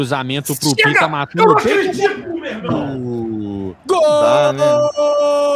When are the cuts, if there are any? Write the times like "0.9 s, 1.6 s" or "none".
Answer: none